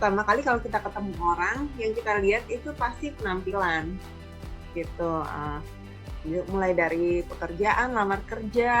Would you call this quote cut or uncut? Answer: uncut